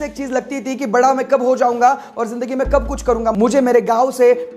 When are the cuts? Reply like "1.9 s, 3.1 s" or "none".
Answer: 3.3 s